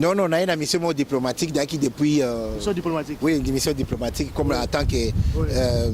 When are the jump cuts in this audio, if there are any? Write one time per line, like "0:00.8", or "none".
none